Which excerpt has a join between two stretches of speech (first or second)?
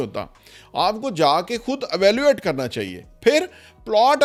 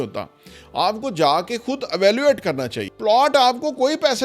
second